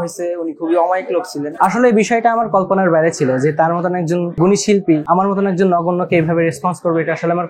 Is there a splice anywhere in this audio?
yes; 3 cuts; at 1.5 s, 4.3 s, 5.0 s

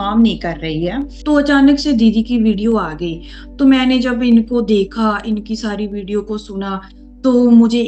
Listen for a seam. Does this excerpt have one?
yes; 1 cut; at 1.1 s

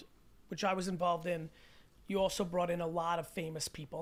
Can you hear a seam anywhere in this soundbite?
no; 0 cuts

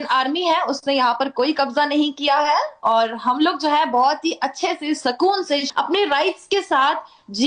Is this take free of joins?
no; 1 cut; at 5.7 s

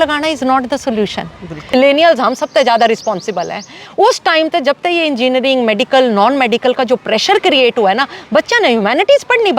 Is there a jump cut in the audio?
yes; 1 cut; at 1.7 s

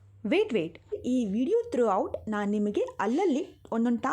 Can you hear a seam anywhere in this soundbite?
yes; 1 cut; at 1.0 s

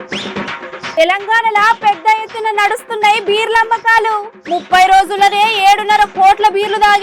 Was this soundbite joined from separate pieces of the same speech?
yes; 1 cut; at 0.9 s

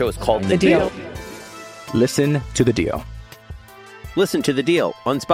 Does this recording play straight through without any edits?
yes; 0 cuts

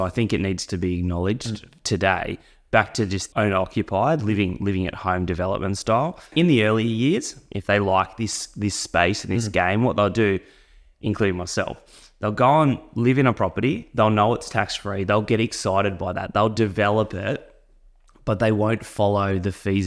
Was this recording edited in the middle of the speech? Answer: yes; 1 cut; at 3.2 s

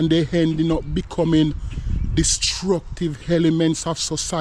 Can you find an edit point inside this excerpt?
no; 0 cuts

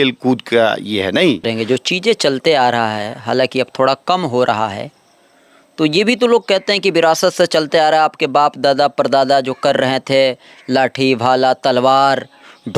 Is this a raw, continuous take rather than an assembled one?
no; 1 cut; at 1.5 s

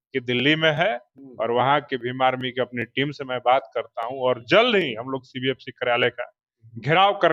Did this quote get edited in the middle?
no; 0 cuts

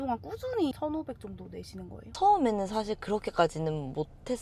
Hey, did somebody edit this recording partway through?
yes; 1 cut; at 2.1 s

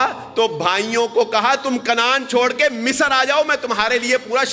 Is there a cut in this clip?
no; 0 cuts

